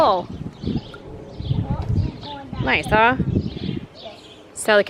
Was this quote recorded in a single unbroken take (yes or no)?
yes